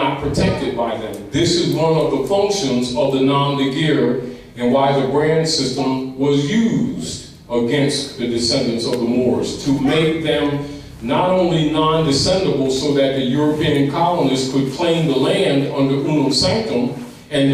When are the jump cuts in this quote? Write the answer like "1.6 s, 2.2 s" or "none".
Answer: 10.0 s